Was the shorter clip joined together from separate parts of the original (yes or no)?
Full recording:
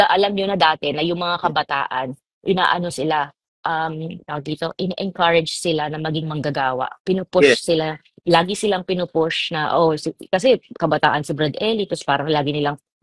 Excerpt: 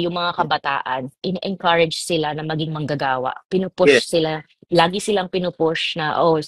yes